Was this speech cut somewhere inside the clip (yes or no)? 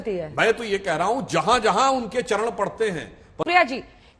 no